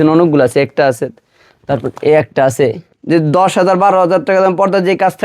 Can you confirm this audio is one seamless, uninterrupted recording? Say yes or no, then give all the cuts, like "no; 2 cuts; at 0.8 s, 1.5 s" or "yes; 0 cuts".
no; 1 cut; at 2.9 s